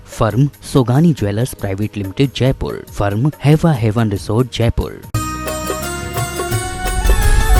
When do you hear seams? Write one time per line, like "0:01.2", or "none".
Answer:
0:05.0